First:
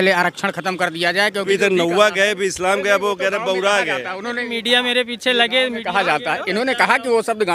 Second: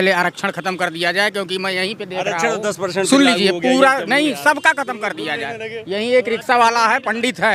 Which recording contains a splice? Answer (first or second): first